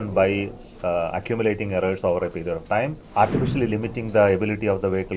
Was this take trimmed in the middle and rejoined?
yes; 1 cut; at 3.0 s

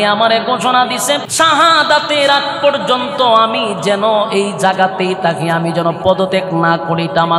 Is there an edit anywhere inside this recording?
yes; 1 cut; at 1.3 s

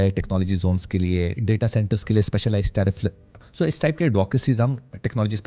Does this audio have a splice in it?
no; 0 cuts

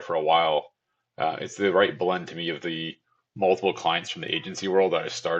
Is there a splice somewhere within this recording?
no; 0 cuts

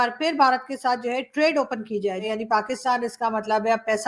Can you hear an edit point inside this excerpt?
yes; 1 cut; at 2.3 s

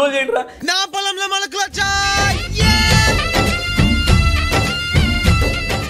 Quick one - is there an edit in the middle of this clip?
no; 0 cuts

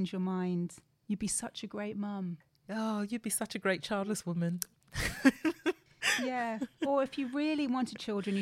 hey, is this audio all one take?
no; 2 cuts; at 2.5 s, 6.0 s

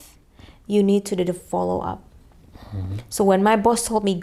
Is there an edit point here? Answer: no; 0 cuts

